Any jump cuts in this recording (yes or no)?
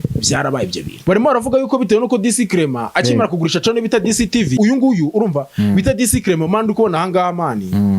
yes